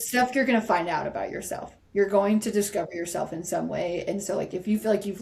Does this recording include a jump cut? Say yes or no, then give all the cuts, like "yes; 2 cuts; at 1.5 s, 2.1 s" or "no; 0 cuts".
no; 0 cuts